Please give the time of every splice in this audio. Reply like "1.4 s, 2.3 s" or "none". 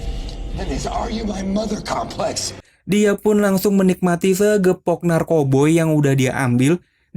2.6 s